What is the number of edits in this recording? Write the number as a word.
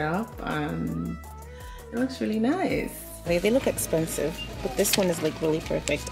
one